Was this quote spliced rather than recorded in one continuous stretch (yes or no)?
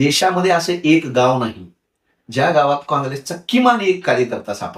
no